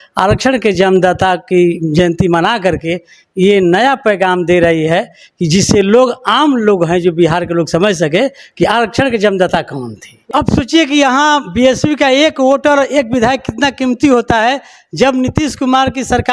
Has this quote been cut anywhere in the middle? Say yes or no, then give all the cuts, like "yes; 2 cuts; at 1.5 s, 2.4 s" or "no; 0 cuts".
yes; 1 cut; at 10.3 s